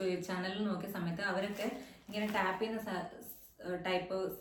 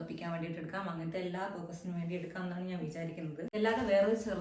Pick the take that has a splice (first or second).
second